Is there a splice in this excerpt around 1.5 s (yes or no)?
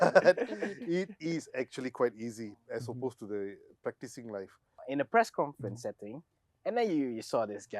no